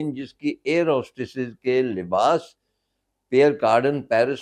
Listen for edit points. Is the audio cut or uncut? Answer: uncut